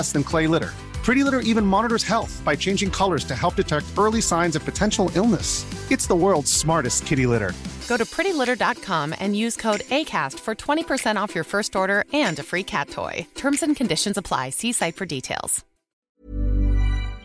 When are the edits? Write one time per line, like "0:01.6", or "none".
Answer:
0:15.9